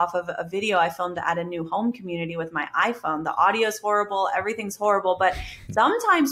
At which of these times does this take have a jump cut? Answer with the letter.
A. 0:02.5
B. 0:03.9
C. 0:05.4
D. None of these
D